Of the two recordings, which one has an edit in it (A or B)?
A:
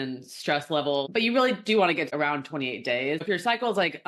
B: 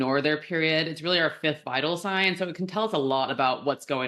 A